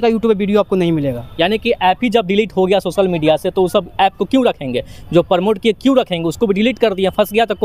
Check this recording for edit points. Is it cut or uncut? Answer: uncut